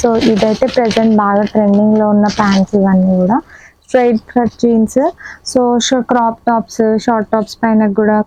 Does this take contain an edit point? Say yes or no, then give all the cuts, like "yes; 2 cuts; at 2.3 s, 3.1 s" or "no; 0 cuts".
no; 0 cuts